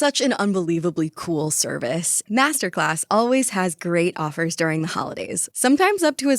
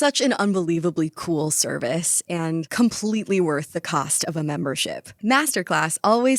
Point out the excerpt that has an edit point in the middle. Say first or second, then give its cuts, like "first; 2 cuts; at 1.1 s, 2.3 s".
first; 1 cut; at 2.2 s